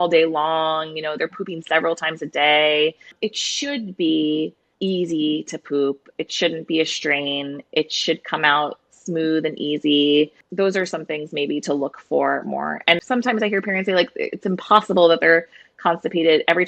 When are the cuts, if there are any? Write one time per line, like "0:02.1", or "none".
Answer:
0:13.0